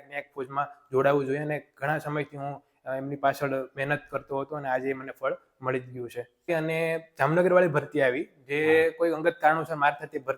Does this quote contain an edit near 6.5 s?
yes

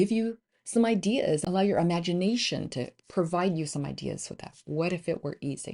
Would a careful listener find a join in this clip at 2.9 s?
no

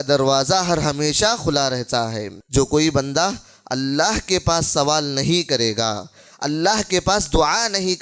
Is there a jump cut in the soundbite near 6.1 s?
no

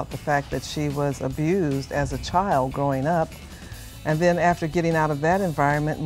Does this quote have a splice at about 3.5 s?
no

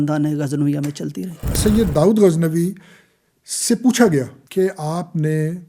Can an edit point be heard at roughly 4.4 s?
yes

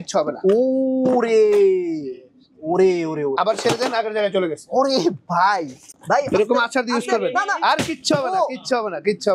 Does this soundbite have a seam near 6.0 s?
yes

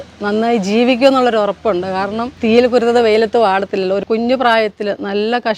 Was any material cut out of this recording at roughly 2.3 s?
yes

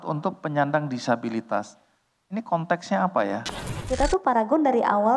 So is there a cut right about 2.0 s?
no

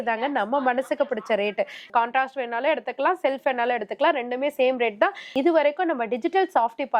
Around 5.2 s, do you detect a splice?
yes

